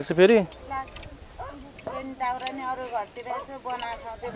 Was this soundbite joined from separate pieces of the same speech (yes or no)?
no